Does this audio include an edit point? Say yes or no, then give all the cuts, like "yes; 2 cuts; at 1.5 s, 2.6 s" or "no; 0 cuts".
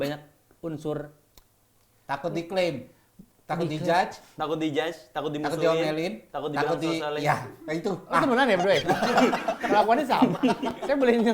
no; 0 cuts